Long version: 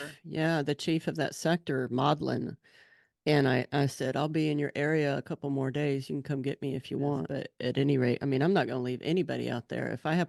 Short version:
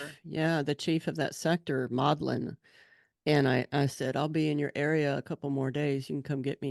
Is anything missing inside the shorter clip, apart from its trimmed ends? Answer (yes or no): no